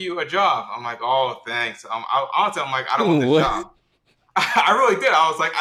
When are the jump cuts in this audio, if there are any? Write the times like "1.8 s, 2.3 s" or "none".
none